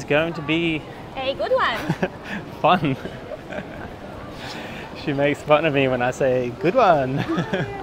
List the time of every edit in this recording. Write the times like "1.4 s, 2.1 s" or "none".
none